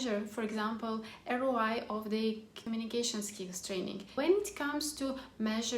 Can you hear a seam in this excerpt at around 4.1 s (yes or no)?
yes